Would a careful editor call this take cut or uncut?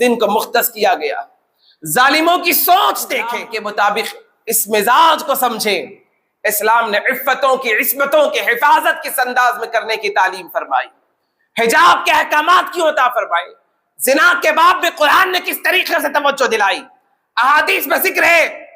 cut